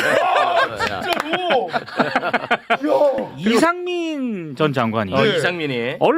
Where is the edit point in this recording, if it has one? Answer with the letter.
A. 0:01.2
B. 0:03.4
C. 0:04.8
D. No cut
B